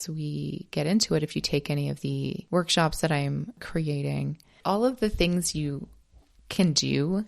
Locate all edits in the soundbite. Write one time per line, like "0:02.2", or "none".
0:02.4
0:03.6
0:04.5